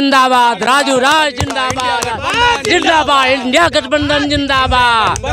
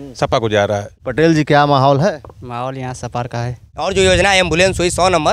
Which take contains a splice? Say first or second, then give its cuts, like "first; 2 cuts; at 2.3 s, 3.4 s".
second; 2 cuts; at 1.0 s, 3.8 s